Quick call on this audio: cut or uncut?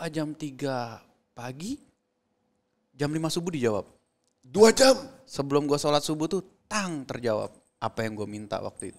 uncut